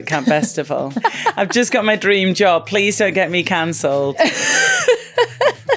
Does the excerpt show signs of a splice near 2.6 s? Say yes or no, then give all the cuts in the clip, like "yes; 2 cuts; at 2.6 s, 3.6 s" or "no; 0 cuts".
no; 2 cuts; at 0.9 s, 4.2 s